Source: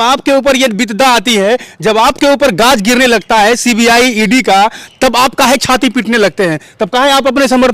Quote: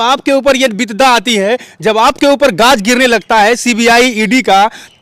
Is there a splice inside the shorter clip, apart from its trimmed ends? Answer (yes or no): no